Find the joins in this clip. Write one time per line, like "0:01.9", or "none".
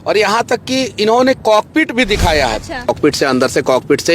0:02.9